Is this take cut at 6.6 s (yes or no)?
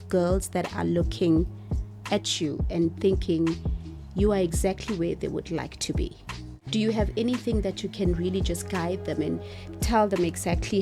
yes